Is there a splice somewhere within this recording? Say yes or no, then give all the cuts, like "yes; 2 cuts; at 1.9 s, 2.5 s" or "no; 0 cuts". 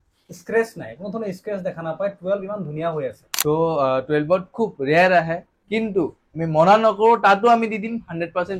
yes; 1 cut; at 3.3 s